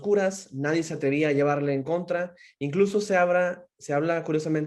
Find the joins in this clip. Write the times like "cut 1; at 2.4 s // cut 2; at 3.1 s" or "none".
none